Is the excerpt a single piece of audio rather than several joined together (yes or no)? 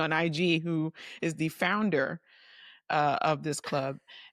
yes